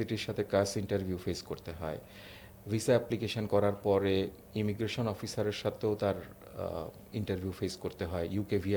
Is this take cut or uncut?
uncut